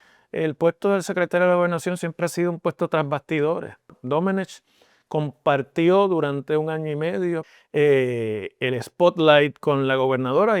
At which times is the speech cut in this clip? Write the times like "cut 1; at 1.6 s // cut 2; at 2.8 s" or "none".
cut 1; at 4.0 s // cut 2; at 7.5 s